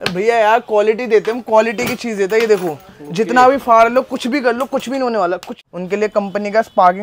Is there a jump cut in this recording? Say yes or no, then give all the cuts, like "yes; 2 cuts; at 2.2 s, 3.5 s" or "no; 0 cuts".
yes; 1 cut; at 5.6 s